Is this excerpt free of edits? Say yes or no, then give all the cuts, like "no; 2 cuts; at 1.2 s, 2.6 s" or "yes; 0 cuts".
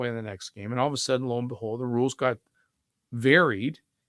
yes; 0 cuts